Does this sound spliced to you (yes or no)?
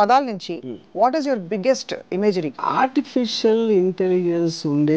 yes